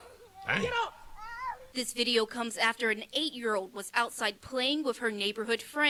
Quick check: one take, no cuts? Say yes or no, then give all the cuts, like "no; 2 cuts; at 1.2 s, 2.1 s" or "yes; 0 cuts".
yes; 0 cuts